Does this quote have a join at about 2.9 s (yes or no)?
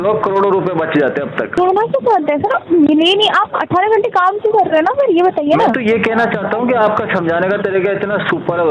no